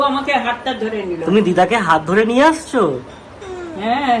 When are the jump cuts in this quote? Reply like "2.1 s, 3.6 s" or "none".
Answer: none

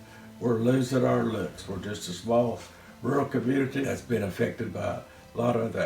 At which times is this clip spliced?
3.8 s

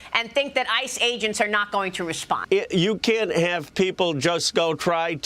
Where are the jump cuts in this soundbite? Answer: 2.4 s

